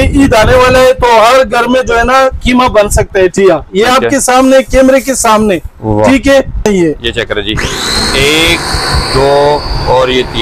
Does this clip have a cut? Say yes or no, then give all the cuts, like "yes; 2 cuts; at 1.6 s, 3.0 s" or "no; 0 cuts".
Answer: yes; 2 cuts; at 3.3 s, 6.7 s